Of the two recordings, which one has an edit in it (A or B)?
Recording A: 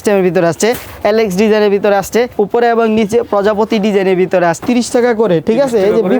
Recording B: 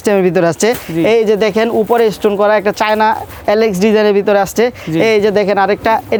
A